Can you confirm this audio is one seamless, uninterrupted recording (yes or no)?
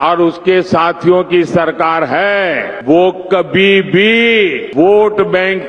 no